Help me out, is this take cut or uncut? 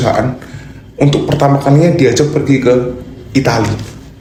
uncut